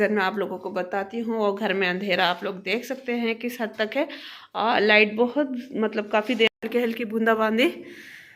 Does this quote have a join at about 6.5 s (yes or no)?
yes